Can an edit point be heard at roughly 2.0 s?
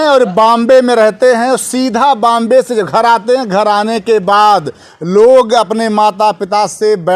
no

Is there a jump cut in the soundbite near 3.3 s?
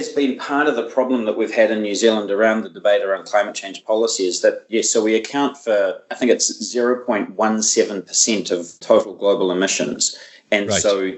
no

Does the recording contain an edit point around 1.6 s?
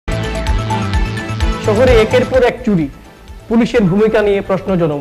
yes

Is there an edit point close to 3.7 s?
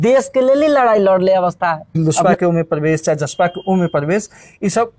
no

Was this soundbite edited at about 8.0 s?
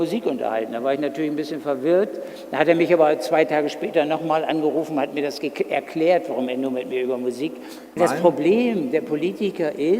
yes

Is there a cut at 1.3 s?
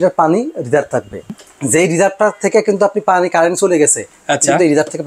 yes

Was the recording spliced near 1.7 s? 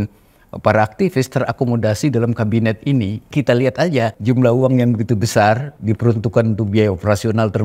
no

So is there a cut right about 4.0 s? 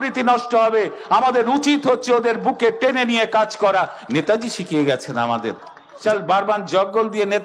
no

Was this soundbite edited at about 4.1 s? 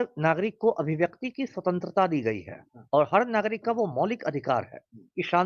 no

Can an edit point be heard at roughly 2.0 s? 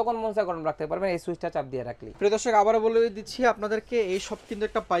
yes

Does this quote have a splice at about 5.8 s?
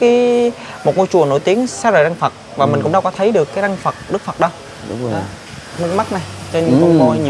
yes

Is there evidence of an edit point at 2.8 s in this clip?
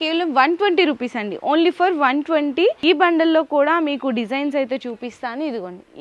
yes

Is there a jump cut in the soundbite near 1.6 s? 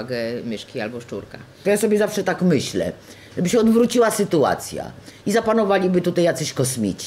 yes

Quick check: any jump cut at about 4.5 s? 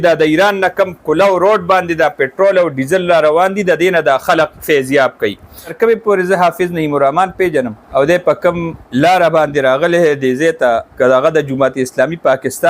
no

